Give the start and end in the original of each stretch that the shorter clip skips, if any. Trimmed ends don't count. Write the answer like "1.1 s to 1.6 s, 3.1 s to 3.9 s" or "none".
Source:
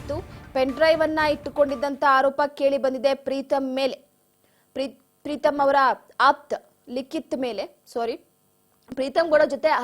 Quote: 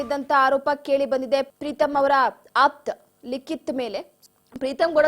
3.2 s to 5.1 s, 7.8 s to 8.5 s